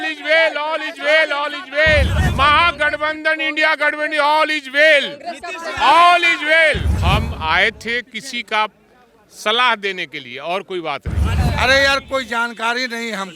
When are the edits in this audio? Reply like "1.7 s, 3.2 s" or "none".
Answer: 2.2 s, 6.9 s, 11.3 s